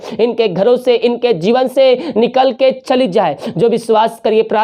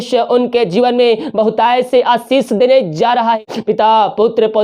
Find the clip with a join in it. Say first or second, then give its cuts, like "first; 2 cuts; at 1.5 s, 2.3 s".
second; 1 cut; at 3.4 s